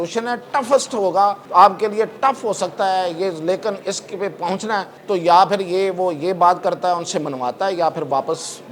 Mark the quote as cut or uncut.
cut